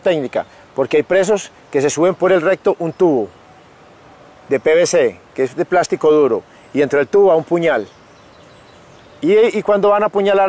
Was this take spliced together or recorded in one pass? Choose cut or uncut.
uncut